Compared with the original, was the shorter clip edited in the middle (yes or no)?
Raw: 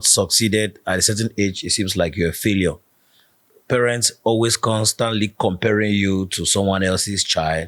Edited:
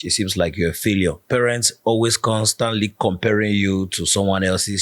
yes